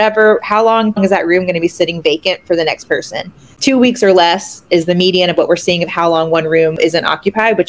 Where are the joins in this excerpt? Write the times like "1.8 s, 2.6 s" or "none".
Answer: 1.0 s, 3.5 s, 6.8 s